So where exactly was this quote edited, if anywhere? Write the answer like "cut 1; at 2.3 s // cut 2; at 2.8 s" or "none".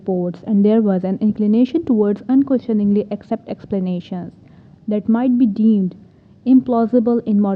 none